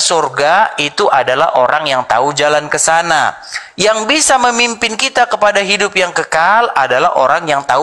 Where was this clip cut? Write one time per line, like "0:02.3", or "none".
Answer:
none

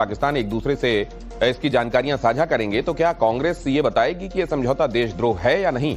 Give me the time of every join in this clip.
0:03.8

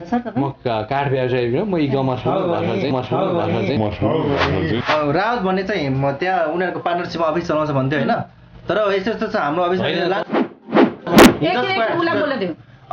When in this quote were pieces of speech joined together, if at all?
0:04.8

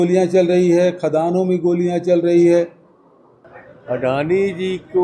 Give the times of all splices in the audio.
0:03.4

